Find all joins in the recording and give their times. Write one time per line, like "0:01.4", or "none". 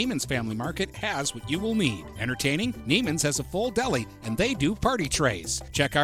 none